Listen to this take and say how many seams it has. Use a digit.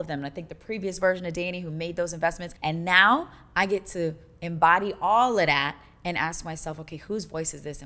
1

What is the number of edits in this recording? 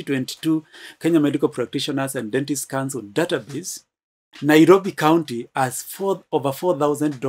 0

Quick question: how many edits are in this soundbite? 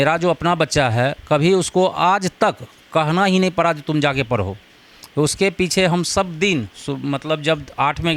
0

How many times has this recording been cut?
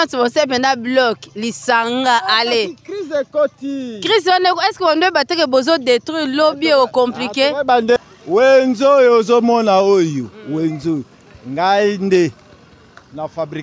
1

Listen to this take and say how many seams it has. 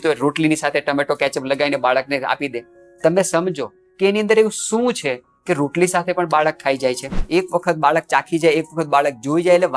1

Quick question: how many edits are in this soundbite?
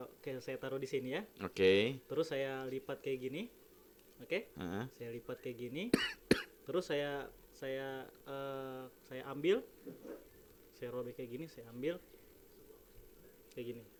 0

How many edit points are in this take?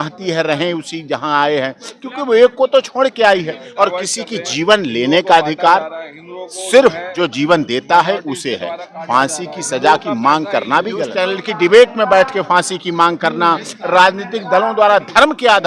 2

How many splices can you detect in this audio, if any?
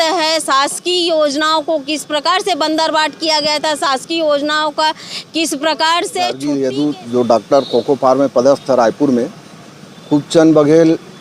1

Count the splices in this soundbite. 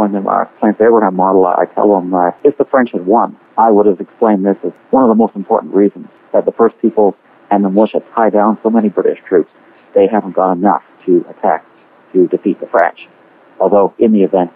2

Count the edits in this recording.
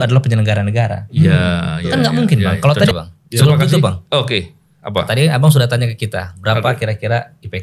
1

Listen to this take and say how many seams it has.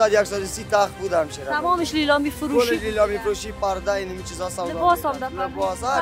0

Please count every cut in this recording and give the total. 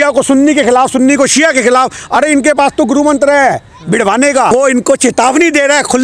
1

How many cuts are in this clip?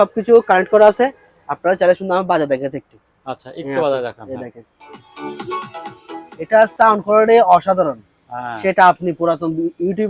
0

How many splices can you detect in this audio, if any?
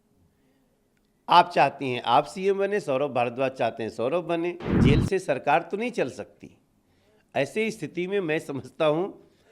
1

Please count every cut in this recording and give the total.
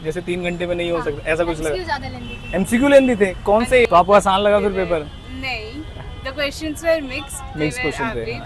1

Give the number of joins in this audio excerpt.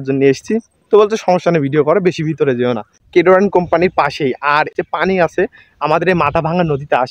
2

